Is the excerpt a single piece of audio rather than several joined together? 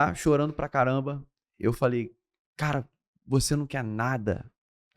yes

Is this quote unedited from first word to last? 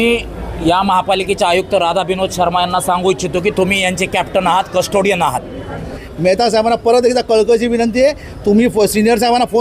no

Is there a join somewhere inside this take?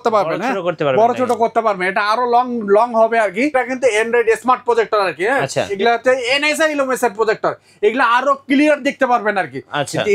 yes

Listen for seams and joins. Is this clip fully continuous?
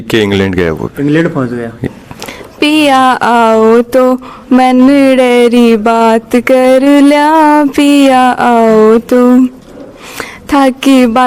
no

